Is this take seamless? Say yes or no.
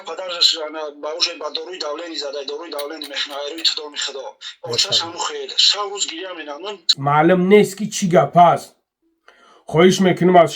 no